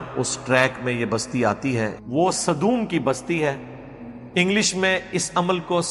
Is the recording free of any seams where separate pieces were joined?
no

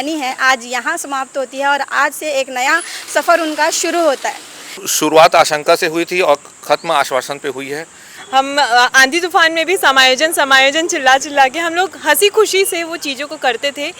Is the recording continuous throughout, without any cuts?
no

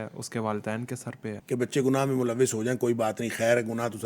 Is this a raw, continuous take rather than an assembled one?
no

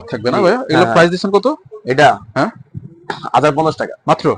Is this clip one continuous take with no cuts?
yes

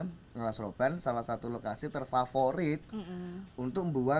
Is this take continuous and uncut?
yes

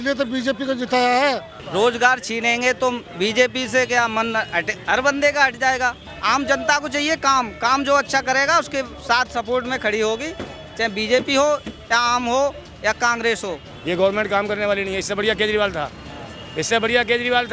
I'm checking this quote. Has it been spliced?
yes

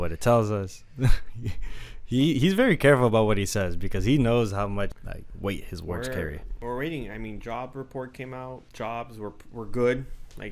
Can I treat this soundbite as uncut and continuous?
no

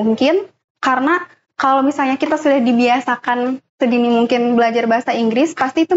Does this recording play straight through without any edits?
yes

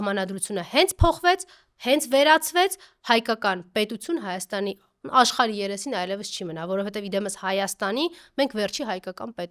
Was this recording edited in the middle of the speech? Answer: no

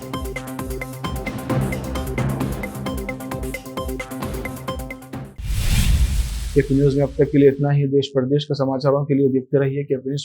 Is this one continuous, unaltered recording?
yes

